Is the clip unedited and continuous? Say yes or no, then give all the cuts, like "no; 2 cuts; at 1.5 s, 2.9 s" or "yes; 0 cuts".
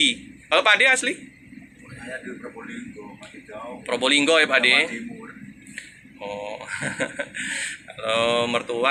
yes; 0 cuts